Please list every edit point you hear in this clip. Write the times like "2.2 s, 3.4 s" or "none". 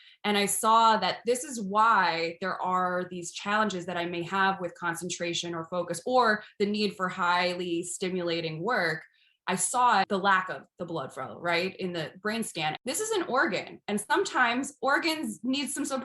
10.1 s, 12.8 s

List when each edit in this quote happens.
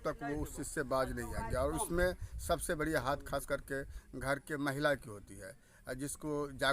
none

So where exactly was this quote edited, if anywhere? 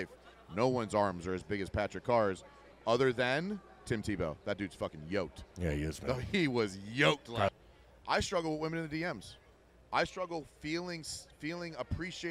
7.5 s

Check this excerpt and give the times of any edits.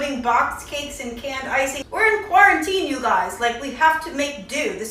1.8 s

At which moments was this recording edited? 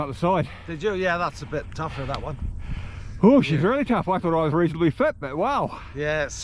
none

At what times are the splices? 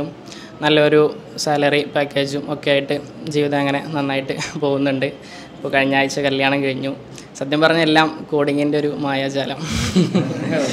none

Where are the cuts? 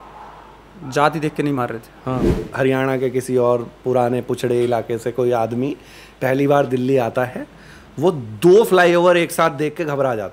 2.4 s

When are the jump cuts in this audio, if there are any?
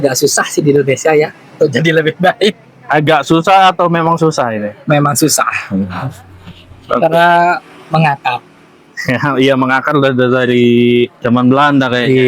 11.2 s

